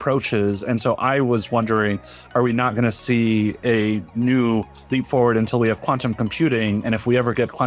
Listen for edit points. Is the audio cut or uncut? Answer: uncut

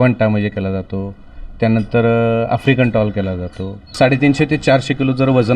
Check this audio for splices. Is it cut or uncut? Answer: cut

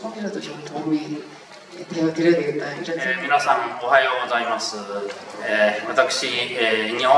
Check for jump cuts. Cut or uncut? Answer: cut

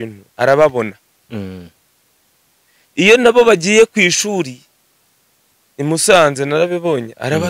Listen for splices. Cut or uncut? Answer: uncut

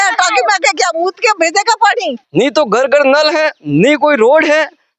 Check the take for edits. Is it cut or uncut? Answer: cut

